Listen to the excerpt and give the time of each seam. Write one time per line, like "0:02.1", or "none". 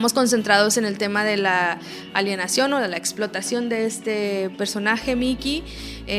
none